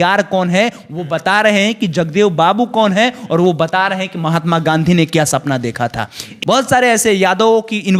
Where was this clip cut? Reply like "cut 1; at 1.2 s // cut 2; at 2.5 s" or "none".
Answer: cut 1; at 6.3 s

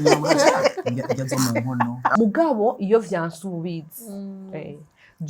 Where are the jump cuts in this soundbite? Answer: cut 1; at 2.1 s

